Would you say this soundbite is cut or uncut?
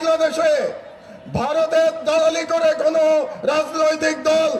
uncut